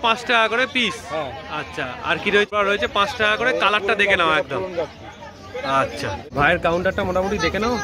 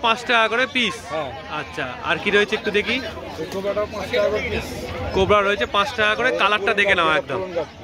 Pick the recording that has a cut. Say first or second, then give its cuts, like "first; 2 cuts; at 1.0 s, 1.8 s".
first; 2 cuts; at 2.6 s, 6.3 s